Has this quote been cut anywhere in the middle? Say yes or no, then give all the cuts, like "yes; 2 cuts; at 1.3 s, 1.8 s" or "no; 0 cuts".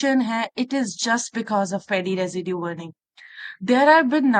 no; 0 cuts